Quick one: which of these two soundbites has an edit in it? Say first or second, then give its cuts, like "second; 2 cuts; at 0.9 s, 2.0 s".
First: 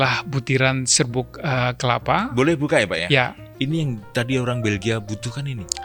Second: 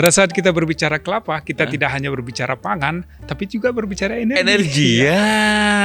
first; 1 cut; at 3.4 s